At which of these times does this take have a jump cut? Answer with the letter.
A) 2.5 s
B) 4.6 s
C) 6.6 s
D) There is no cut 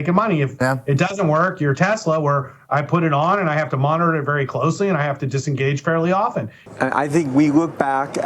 C